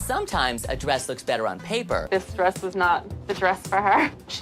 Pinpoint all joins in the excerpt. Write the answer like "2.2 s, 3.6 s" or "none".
2.0 s